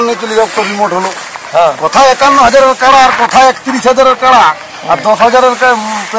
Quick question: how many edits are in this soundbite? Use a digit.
1